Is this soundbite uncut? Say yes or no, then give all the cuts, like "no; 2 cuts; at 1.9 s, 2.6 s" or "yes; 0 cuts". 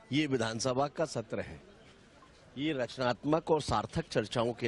yes; 0 cuts